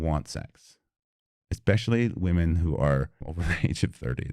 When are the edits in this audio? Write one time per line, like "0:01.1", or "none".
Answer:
0:03.2